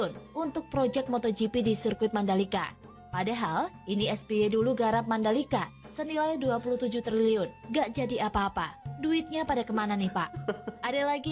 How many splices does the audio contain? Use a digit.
0